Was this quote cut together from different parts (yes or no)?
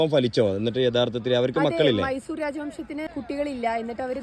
yes